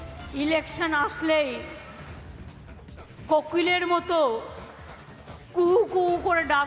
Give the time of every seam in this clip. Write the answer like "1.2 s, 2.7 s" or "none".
1.9 s, 3.3 s